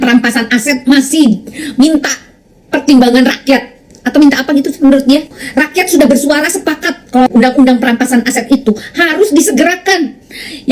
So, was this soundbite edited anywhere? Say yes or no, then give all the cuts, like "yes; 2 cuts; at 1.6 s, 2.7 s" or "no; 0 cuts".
yes; 1 cut; at 5.4 s